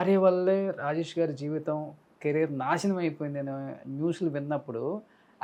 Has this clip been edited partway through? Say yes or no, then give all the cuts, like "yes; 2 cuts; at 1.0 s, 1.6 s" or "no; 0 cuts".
no; 0 cuts